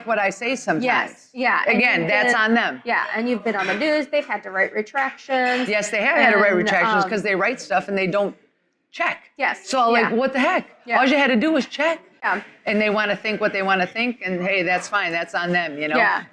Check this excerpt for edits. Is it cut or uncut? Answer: cut